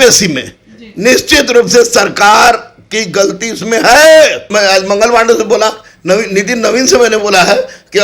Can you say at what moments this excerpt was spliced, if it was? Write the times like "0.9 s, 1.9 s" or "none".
4.4 s